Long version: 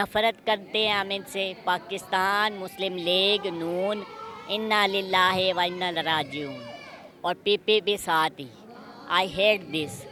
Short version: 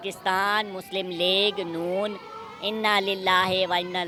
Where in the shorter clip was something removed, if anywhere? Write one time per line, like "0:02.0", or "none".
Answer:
none